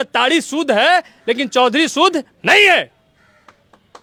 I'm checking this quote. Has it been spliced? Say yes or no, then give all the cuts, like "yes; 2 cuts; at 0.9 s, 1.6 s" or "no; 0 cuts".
no; 0 cuts